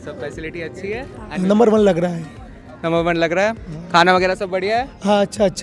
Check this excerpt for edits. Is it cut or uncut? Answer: cut